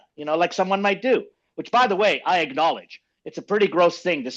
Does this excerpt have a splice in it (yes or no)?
no